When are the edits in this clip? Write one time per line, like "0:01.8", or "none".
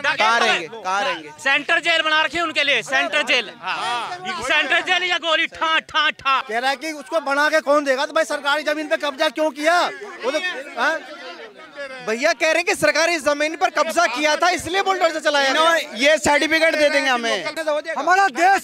0:06.4
0:17.6